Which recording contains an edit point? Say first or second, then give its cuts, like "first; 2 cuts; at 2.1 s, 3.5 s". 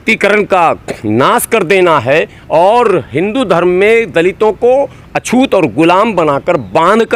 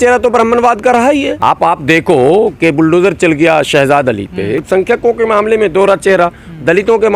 second; 1 cut; at 4.7 s